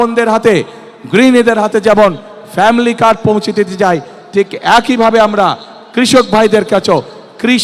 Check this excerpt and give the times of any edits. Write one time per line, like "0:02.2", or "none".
none